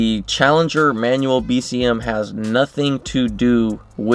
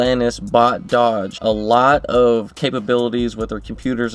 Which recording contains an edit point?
second; 2 cuts; at 1.3 s, 2.5 s

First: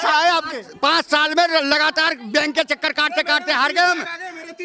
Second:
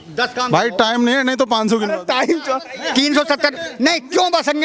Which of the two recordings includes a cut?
second; 1 cut; at 2.7 s

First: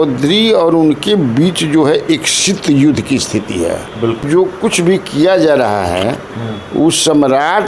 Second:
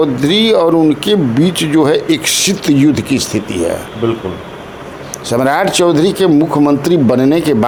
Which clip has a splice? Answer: first; 1 cut; at 4.2 s

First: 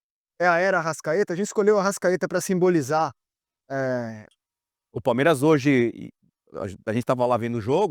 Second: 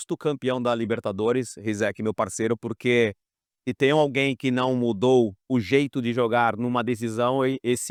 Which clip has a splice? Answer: first; 1 cut; at 4.3 s

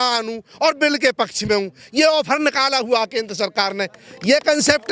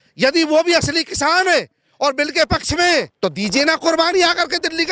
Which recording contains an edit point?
second; 1 cut; at 3.1 s

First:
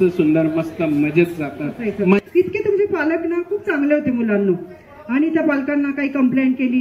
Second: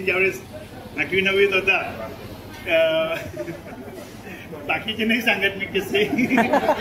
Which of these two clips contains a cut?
first; 1 cut; at 2.2 s

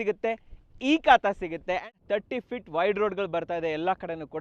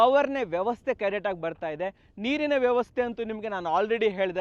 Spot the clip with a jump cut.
first; 1 cut; at 1.9 s

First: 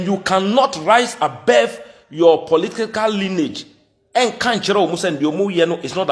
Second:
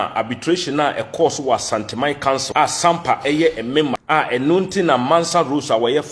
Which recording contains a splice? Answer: second; 2 cuts; at 2.5 s, 4.0 s

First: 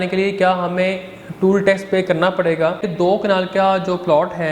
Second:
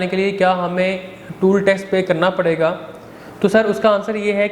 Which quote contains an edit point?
first; 1 cut; at 2.9 s

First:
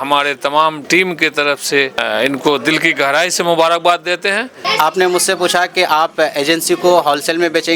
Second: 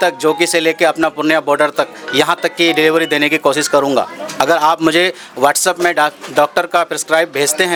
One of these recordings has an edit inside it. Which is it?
first; 3 cuts; at 0.8 s, 2.0 s, 4.6 s

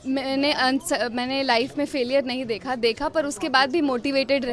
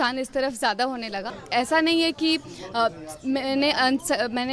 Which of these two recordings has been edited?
second; 1 cut; at 1.4 s

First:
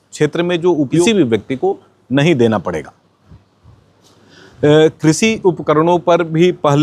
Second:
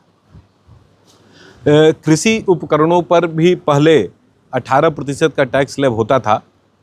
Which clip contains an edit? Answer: first; 1 cut; at 1.0 s

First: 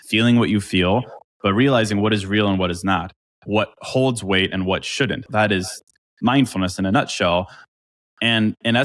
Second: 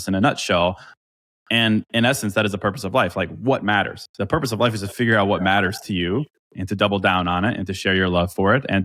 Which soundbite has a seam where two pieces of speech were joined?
first; 1 cut; at 5.2 s

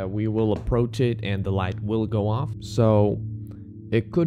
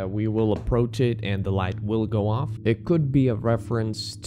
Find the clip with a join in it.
second; 1 cut; at 2.5 s

